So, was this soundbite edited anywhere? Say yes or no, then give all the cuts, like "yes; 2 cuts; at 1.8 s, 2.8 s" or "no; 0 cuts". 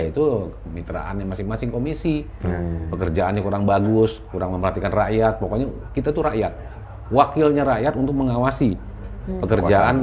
no; 0 cuts